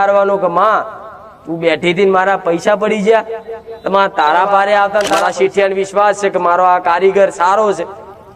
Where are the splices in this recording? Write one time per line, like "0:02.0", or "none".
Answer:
0:05.1